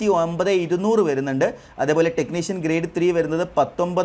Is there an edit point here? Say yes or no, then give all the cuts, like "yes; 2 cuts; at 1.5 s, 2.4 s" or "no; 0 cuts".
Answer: no; 0 cuts